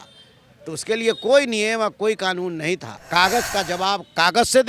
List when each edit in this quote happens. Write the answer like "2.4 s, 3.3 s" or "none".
2.9 s